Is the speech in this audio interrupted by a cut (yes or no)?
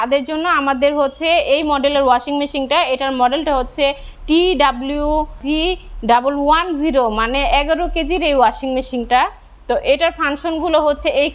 no